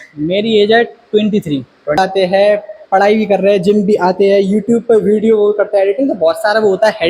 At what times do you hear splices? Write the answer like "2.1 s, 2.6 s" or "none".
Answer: 2.0 s